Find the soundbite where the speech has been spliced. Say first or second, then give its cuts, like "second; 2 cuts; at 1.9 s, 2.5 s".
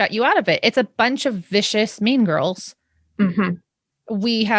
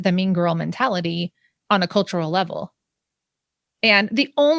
first; 1 cut; at 3.5 s